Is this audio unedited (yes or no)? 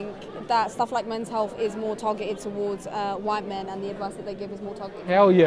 yes